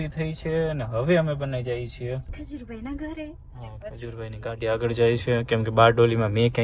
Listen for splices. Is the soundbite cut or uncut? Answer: uncut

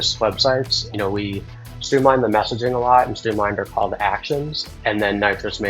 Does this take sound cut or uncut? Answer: cut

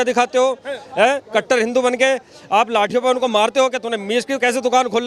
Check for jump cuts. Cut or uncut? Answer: uncut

